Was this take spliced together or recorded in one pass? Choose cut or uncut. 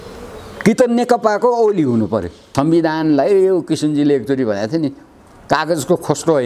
cut